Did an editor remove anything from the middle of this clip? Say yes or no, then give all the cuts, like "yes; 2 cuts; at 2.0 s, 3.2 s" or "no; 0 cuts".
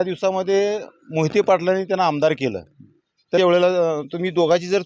yes; 1 cut; at 3.4 s